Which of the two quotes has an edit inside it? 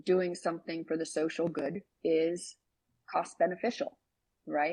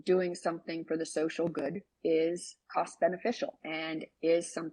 second; 2 cuts; at 2.5 s, 3.6 s

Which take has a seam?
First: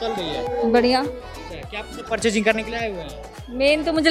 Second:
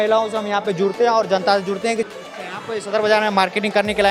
second; 1 cut; at 2.1 s

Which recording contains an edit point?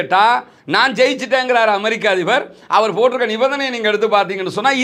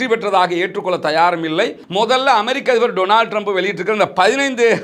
second; 1 cut; at 1.8 s

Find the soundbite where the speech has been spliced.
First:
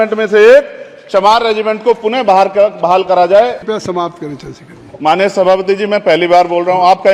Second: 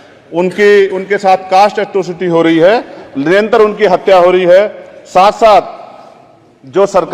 first; 1 cut; at 3.6 s

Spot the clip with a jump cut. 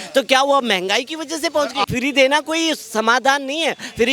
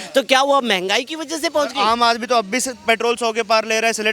first; 1 cut; at 1.8 s

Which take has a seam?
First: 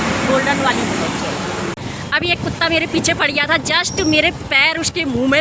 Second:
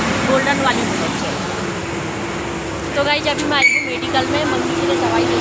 first; 1 cut; at 1.8 s

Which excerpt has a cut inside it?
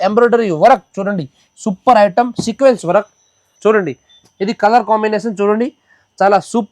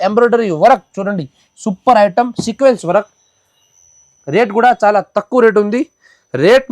first; 1 cut; at 3.4 s

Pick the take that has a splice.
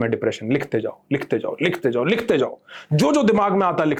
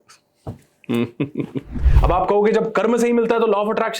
second; 1 cut; at 1.8 s

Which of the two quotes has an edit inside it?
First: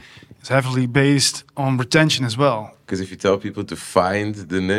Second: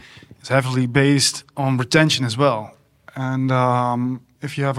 first; 1 cut; at 2.8 s

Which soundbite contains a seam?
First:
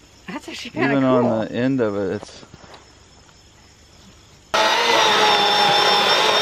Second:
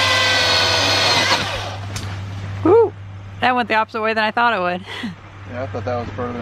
first; 1 cut; at 4.5 s

